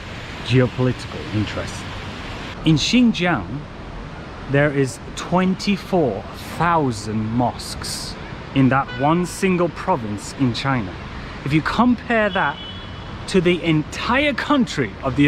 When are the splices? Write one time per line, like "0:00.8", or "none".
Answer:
0:02.4